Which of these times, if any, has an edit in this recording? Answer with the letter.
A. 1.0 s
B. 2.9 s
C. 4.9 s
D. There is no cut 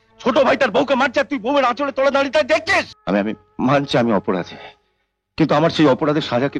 B